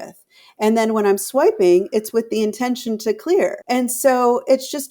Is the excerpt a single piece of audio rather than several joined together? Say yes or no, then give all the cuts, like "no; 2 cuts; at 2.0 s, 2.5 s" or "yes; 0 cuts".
no; 1 cut; at 3.6 s